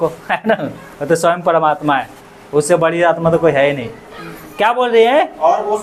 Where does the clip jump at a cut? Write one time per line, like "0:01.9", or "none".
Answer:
none